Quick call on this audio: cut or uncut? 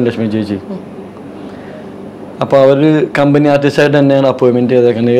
uncut